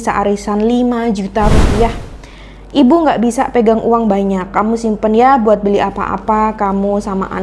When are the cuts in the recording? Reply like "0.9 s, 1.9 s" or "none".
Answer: none